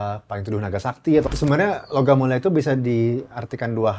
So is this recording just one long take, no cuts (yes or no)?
no